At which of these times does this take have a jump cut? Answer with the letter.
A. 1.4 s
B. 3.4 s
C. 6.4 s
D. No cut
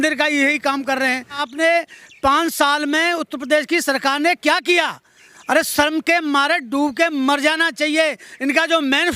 A